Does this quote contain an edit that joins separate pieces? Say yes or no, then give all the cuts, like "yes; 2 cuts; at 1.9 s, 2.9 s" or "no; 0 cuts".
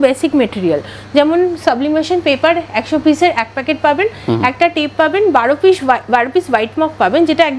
no; 0 cuts